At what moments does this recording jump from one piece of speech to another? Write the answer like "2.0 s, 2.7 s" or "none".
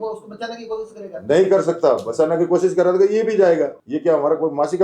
3.8 s

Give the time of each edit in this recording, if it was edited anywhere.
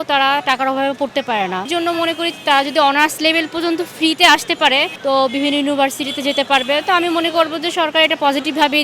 1.7 s, 4.9 s

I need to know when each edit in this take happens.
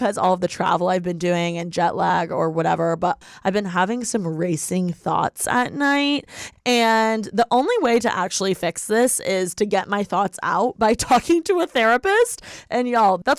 3.2 s, 6.5 s

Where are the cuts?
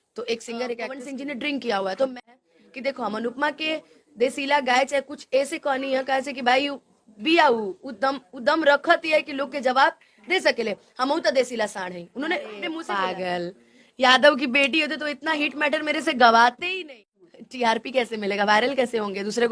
1.0 s, 2.2 s, 12.7 s, 16.8 s

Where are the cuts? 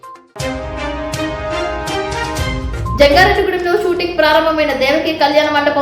2.7 s

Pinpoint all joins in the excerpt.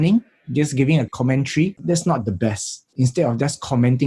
1.8 s, 2.9 s

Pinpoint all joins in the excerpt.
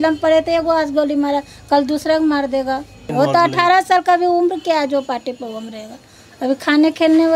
3.0 s

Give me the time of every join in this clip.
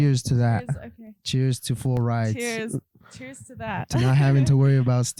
none

